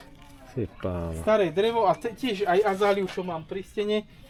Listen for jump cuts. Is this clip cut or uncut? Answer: uncut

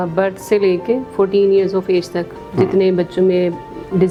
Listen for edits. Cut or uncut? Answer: uncut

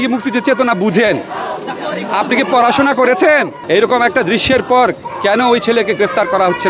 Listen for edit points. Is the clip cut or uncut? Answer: cut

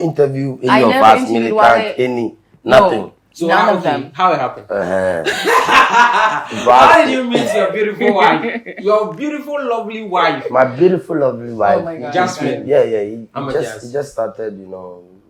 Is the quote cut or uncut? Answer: uncut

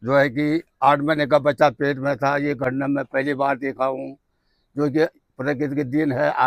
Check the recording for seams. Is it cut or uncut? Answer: uncut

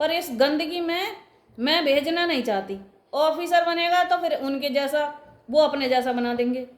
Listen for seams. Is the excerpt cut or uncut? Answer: uncut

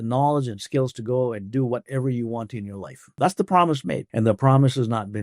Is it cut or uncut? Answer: cut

